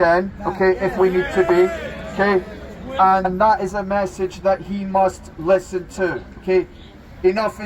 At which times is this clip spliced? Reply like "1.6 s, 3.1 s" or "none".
3.3 s